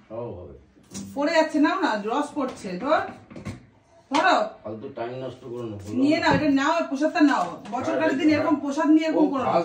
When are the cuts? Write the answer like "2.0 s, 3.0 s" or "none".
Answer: none